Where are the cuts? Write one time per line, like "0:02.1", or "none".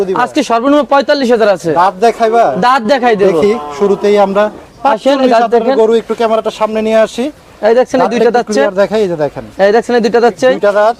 none